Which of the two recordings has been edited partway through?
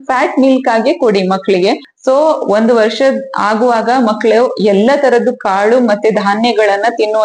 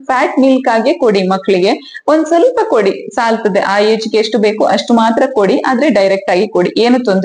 first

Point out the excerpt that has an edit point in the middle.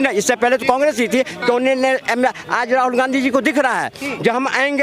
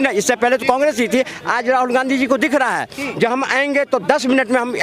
second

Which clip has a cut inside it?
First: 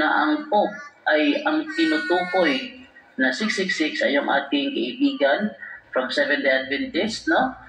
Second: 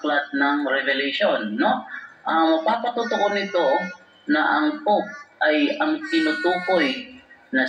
second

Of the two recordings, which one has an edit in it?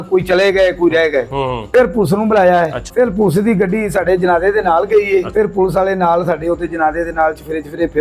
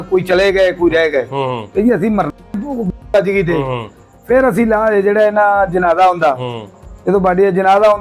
first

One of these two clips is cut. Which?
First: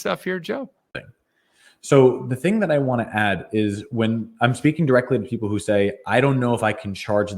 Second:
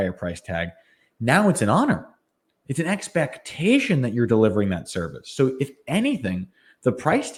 first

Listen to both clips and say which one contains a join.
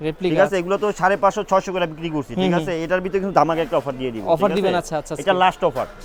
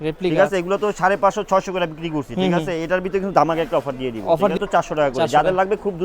second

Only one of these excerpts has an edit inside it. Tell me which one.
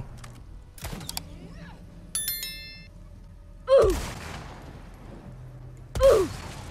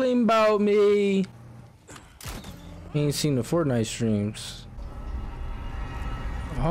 second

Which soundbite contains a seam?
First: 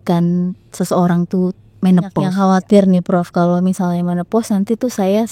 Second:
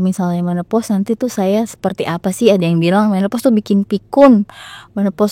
first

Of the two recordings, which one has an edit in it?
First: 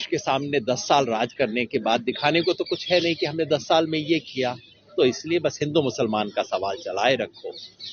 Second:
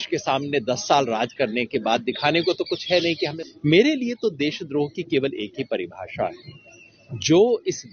second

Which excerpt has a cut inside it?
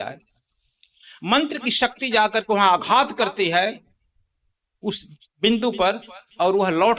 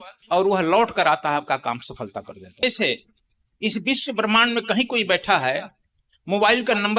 second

